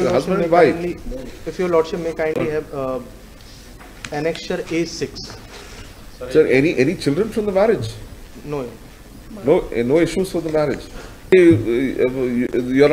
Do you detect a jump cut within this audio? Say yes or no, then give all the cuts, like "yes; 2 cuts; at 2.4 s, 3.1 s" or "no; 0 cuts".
yes; 1 cut; at 11.3 s